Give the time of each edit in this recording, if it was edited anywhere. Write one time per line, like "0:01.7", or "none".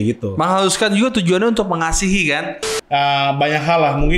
0:02.5